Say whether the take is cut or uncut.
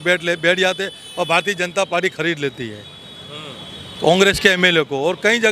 uncut